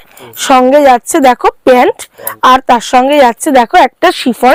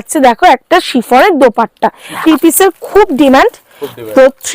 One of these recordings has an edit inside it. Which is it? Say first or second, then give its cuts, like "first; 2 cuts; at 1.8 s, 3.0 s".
second; 1 cut; at 2.2 s